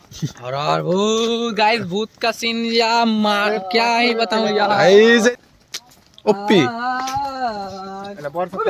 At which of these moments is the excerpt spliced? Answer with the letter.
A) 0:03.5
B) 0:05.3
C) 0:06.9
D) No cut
B